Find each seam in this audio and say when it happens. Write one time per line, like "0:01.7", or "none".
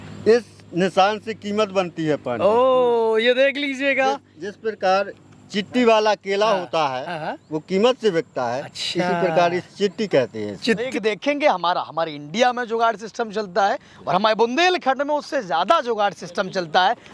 0:10.9